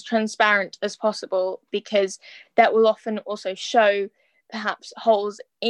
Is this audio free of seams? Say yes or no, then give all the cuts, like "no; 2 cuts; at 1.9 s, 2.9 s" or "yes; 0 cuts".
yes; 0 cuts